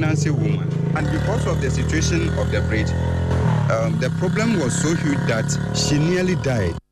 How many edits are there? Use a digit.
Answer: 2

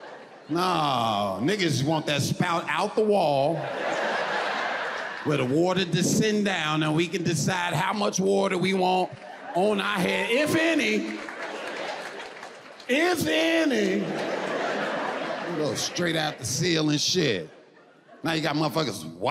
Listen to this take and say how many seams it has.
1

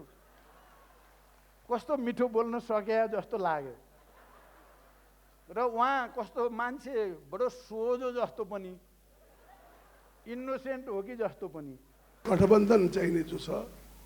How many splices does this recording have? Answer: 1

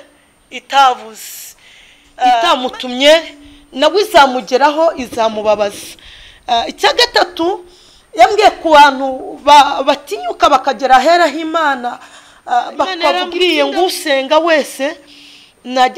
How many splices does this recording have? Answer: 2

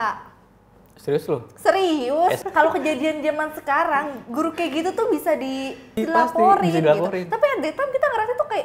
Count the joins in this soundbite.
2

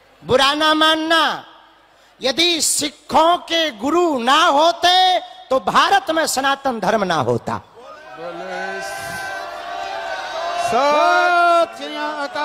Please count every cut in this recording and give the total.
0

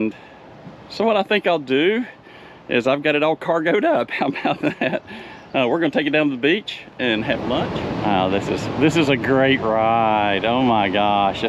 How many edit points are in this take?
1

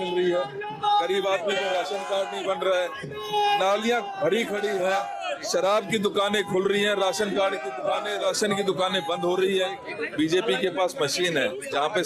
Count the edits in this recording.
1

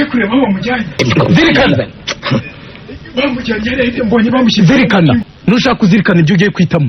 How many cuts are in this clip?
2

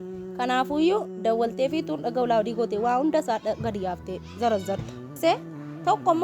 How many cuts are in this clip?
1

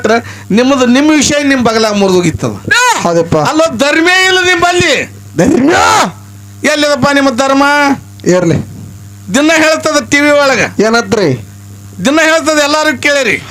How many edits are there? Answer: 0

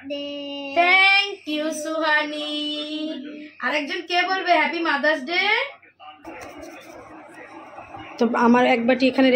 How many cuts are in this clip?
1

